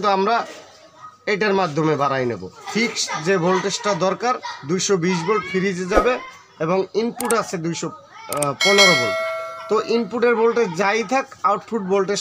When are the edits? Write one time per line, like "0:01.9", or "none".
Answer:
0:02.7